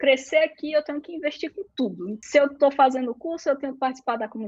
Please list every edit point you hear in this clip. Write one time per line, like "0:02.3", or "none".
0:02.1